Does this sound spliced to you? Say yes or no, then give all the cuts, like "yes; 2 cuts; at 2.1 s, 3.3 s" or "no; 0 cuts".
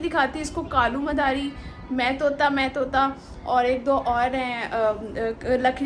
no; 0 cuts